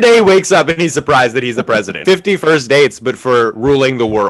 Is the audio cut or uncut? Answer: cut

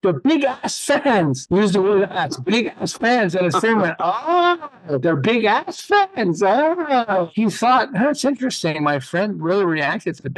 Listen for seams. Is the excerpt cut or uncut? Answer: uncut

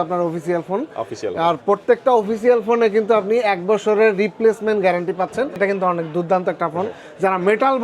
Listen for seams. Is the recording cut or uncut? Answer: cut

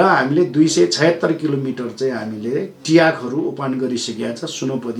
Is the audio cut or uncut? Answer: uncut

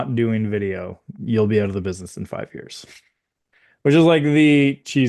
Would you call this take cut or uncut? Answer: uncut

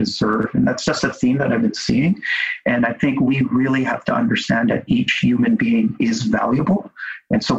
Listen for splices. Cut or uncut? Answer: uncut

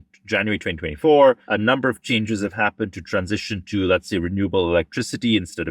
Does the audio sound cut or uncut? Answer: cut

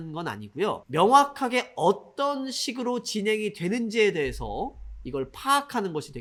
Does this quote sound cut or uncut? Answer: uncut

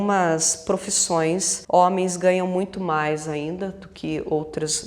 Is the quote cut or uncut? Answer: cut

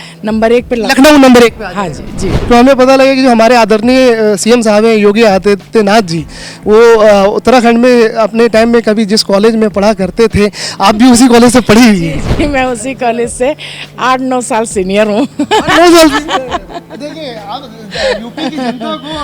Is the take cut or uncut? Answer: cut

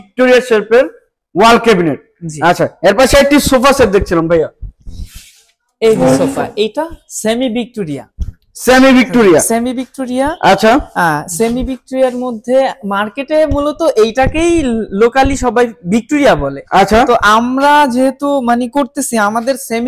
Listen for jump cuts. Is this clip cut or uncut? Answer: uncut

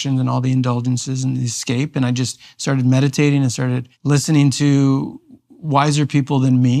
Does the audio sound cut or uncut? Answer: cut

